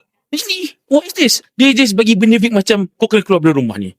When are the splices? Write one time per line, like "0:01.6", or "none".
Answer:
0:01.4